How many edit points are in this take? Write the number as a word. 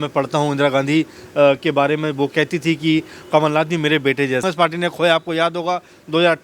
one